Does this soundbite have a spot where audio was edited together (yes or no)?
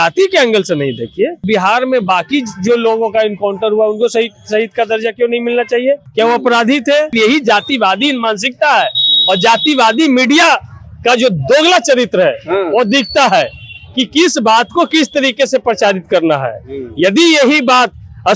yes